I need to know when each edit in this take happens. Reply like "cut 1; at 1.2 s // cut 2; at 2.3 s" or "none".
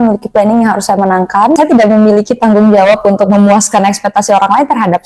cut 1; at 1.6 s

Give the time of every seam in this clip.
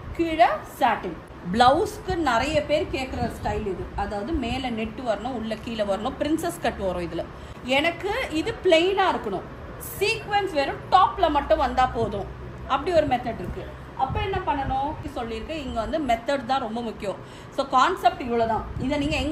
cut 1; at 1.2 s // cut 2; at 7.5 s // cut 3; at 15.0 s

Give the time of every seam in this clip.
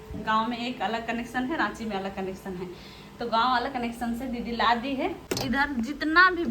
cut 1; at 5.2 s

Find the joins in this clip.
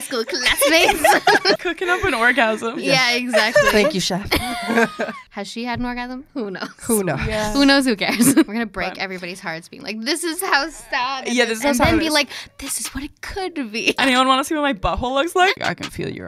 cut 1; at 1.6 s // cut 2; at 5.2 s // cut 3; at 8.5 s // cut 4; at 14.0 s // cut 5; at 15.5 s

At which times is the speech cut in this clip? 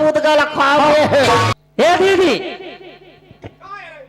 cut 1; at 1.5 s

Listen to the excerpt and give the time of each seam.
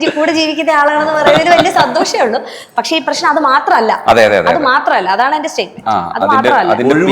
none

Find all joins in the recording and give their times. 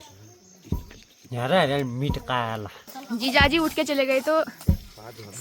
cut 1; at 3.0 s

